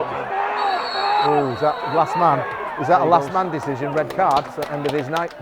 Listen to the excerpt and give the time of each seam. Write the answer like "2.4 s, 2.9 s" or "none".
4.5 s